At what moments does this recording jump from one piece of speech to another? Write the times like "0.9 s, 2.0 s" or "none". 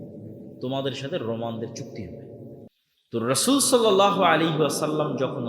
2.7 s